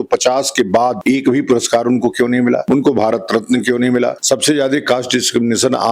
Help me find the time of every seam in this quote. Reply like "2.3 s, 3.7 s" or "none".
1.0 s, 2.6 s, 4.2 s